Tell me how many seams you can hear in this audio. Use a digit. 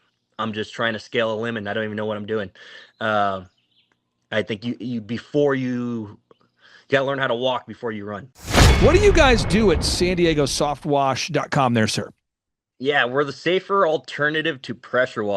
1